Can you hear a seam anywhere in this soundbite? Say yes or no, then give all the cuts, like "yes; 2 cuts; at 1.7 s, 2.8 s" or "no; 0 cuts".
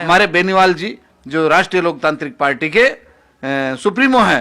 no; 0 cuts